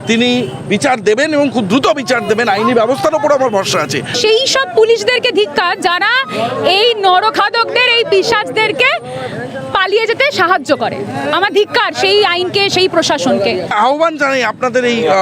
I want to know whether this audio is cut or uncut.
cut